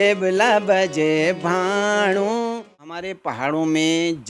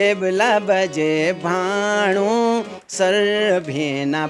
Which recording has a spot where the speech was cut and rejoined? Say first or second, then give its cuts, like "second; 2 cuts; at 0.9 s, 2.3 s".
first; 1 cut; at 2.9 s